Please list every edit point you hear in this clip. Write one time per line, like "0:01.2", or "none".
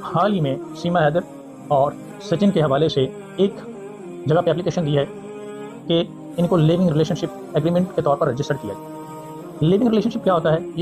none